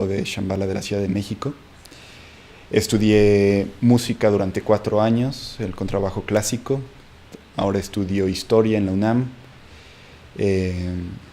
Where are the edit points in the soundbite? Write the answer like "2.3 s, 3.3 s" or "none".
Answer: 5.2 s